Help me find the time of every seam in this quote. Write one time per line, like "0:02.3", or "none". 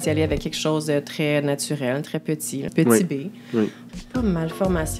0:02.7
0:03.9